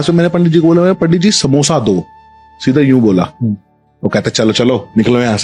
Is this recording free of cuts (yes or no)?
yes